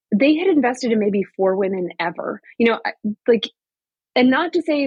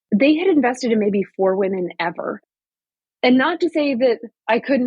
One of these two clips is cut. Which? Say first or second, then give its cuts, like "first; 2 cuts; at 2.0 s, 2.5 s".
second; 1 cut; at 2.5 s